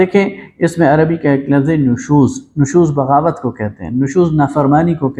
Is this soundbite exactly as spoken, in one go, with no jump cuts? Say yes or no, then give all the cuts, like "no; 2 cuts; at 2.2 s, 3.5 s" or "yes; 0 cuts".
yes; 0 cuts